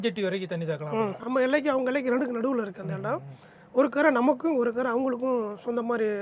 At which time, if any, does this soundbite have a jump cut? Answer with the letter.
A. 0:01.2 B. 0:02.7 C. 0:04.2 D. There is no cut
A